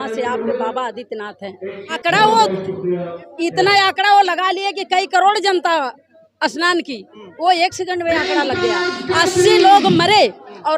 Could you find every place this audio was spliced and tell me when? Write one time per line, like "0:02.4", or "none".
0:02.0